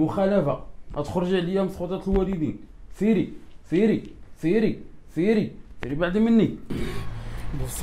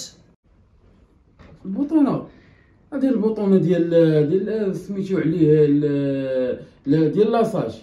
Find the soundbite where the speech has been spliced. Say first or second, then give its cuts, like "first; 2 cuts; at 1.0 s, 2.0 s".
first; 1 cut; at 6.7 s